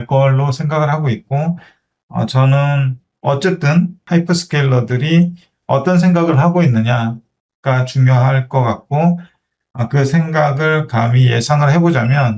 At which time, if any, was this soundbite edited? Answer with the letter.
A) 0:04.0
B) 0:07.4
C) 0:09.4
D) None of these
A